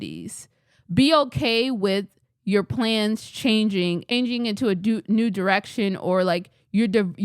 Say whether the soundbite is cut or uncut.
cut